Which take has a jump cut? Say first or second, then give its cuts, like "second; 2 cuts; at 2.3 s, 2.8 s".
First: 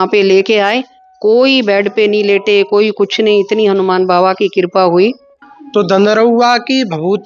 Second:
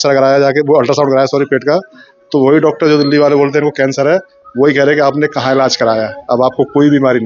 first; 1 cut; at 5.4 s